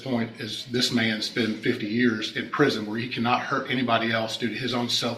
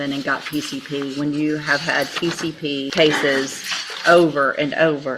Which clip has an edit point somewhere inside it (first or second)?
second